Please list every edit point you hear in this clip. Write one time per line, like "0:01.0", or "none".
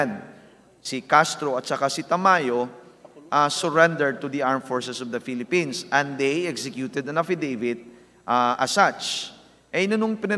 none